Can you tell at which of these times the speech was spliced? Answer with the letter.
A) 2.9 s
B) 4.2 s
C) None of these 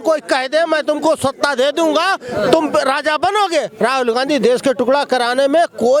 C